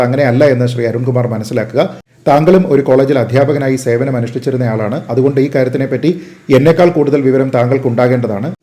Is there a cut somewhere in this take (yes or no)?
no